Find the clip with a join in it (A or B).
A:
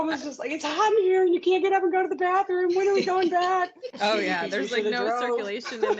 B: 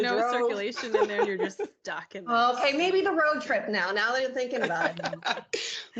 A